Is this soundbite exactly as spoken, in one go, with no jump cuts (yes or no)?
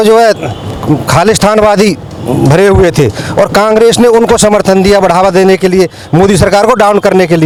yes